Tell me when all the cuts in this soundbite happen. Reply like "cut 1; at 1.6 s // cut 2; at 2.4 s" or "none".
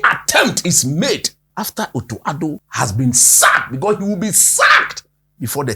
cut 1; at 1.4 s // cut 2; at 2.7 s